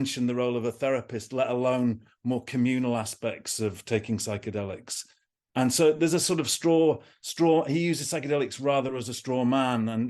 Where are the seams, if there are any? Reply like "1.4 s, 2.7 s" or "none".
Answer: none